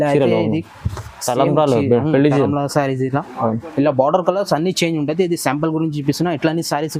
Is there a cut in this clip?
no; 0 cuts

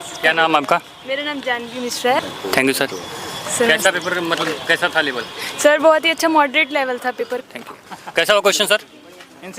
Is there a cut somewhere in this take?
yes; 2 cuts; at 2.2 s, 7.2 s

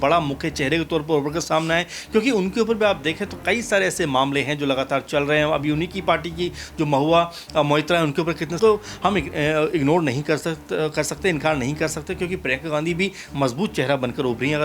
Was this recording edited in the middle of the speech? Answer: yes; 1 cut; at 8.6 s

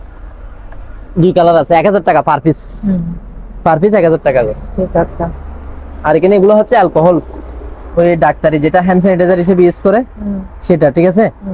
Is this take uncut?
yes; 0 cuts

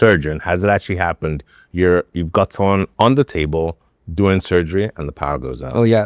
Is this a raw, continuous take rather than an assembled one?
yes; 0 cuts

